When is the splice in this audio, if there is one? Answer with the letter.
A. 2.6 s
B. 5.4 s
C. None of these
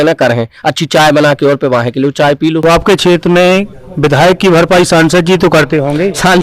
A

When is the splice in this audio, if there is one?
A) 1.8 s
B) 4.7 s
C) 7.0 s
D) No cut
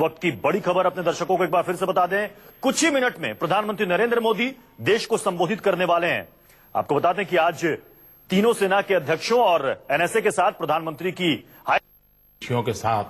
C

